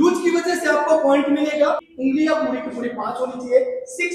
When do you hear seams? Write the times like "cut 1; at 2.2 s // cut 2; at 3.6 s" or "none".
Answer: cut 1; at 1.9 s